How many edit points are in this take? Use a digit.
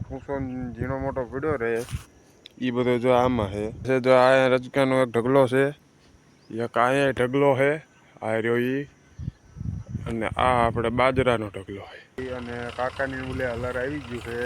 2